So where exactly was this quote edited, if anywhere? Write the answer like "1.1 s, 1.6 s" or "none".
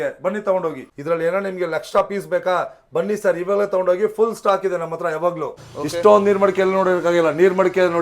5.5 s